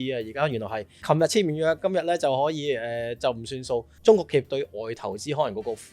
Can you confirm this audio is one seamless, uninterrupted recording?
no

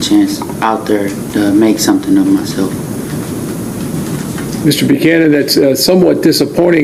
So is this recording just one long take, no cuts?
yes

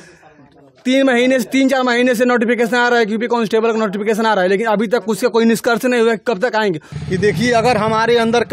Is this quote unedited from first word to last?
no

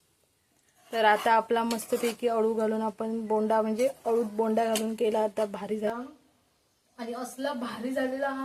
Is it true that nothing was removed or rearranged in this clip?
no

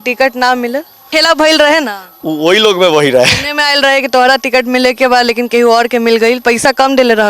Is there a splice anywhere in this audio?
yes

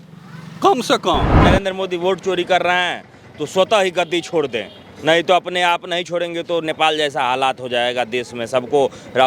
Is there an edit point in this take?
yes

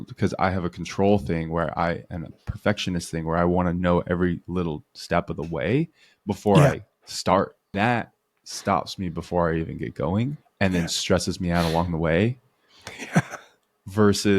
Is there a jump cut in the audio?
yes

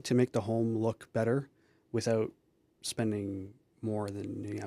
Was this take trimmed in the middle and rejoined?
no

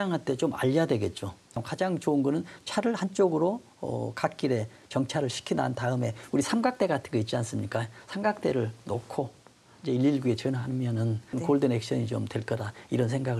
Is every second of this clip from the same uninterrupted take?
no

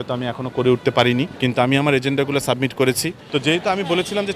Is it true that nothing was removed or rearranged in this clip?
no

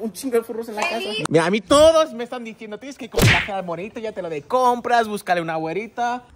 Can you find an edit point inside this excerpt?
yes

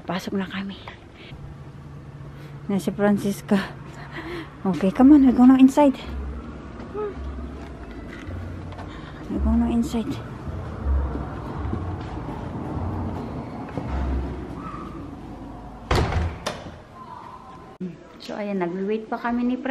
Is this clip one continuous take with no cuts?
yes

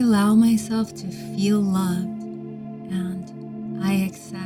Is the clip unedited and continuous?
yes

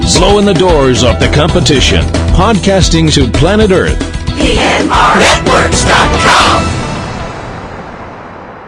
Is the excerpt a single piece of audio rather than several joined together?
yes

